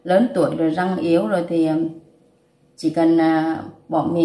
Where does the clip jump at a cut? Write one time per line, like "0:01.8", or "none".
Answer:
none